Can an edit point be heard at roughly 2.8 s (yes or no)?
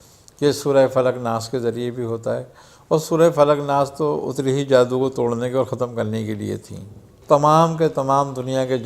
no